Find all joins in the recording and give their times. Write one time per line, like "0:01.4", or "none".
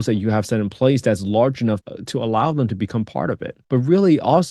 0:03.5